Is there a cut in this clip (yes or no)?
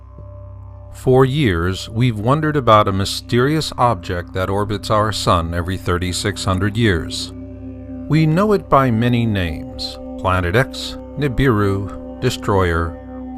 yes